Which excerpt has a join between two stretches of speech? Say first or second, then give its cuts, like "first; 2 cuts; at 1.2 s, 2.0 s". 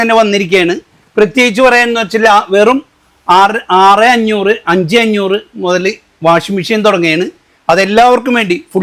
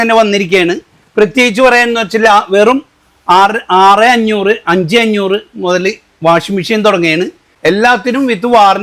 second; 1 cut; at 7.5 s